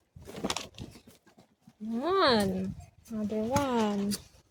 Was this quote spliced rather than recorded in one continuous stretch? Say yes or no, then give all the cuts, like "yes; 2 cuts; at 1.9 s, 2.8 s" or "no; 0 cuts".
no; 0 cuts